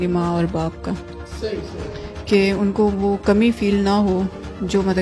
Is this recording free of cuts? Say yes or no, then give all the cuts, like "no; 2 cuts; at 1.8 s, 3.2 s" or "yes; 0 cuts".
yes; 0 cuts